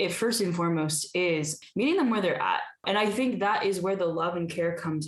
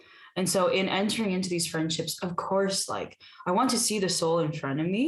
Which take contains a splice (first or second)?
first